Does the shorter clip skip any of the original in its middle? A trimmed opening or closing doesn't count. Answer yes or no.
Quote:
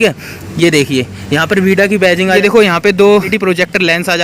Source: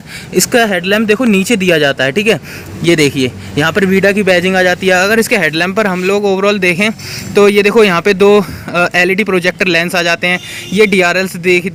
yes